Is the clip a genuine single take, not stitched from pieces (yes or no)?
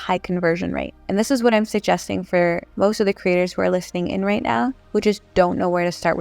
no